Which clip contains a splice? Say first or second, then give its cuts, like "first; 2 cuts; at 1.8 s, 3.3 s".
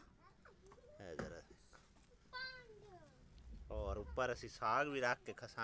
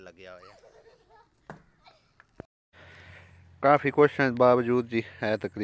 second; 1 cut; at 2.6 s